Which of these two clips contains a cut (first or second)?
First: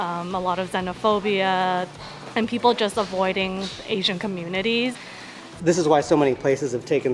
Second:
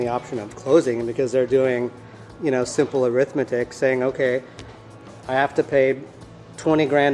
first